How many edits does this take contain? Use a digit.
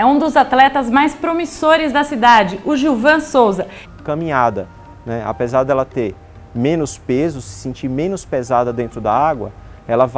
0